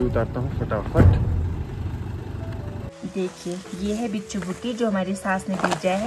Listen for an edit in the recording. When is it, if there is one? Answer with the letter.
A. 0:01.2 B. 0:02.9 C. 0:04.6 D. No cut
B